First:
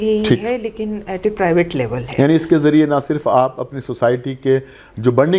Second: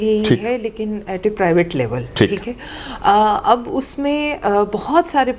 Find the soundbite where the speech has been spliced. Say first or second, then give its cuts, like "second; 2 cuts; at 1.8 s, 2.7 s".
first; 1 cut; at 2.0 s